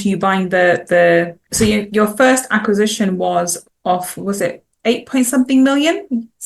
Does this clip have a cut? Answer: yes; 1 cut; at 1.4 s

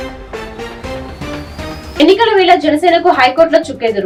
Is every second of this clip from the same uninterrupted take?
yes; 0 cuts

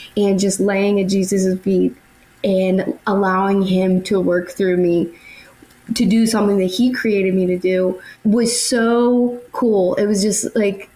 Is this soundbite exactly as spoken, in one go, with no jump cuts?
no; 2 cuts; at 8.1 s, 9.4 s

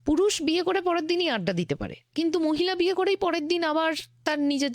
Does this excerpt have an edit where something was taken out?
yes; 1 cut; at 2.0 s

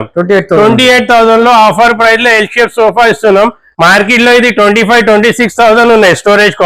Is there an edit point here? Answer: yes; 1 cut; at 3.6 s

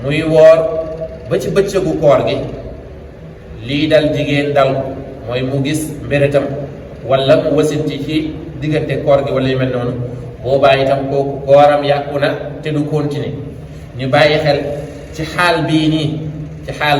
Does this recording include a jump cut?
no; 0 cuts

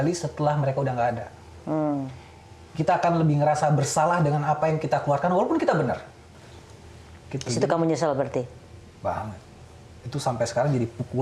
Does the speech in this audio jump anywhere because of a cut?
yes; 1 cut; at 6.2 s

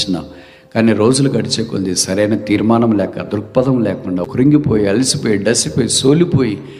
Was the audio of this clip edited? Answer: yes; 1 cut; at 4.2 s

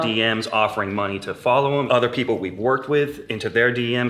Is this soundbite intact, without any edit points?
no; 1 cut; at 1.9 s

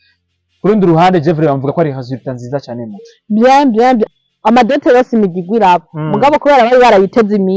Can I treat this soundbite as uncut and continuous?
no; 1 cut; at 4.2 s

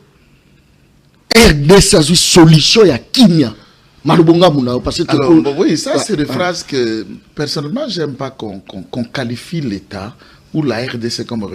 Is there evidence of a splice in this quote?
no; 0 cuts

